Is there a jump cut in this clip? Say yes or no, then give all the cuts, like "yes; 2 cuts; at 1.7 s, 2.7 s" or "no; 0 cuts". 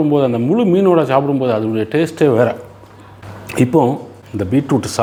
no; 0 cuts